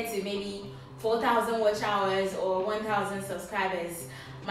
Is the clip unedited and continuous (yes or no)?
yes